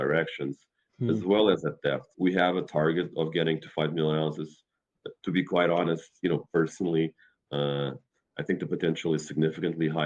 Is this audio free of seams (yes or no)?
no